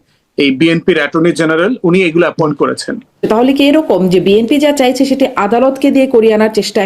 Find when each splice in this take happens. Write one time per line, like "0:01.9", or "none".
0:03.2